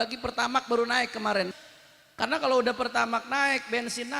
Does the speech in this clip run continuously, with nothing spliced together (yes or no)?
no